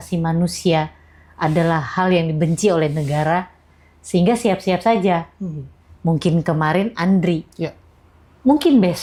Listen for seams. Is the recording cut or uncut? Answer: uncut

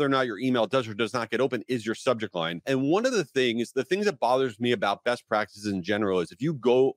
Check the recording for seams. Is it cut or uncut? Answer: cut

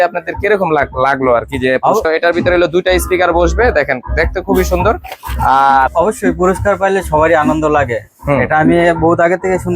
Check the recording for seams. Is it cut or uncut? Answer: cut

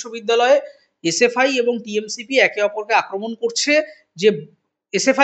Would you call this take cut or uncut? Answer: uncut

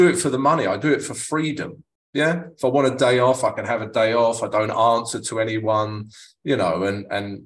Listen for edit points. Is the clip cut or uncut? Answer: uncut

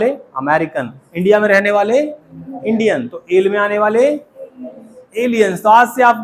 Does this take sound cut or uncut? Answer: uncut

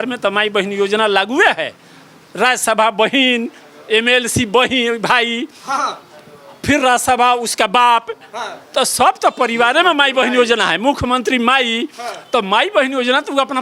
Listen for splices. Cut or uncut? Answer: uncut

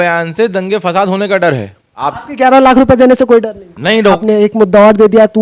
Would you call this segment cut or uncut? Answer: cut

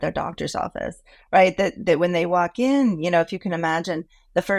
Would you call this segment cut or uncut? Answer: uncut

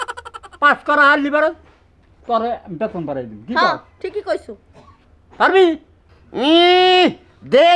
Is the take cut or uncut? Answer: uncut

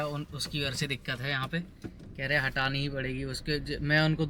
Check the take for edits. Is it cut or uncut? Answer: uncut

